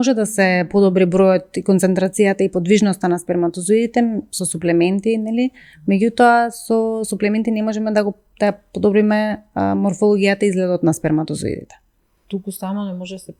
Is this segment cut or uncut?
uncut